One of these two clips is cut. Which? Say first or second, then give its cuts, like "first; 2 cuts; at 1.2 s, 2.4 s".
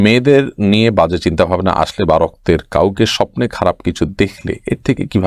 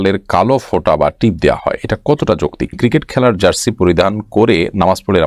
second; 1 cut; at 2.8 s